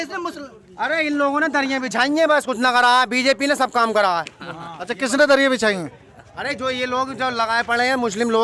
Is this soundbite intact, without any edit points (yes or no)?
yes